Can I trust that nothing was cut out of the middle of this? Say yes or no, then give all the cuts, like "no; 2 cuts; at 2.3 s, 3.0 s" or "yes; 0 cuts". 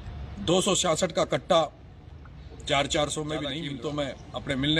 no; 1 cut; at 3.6 s